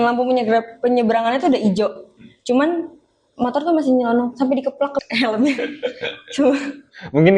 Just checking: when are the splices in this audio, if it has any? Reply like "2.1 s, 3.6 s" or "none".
5.0 s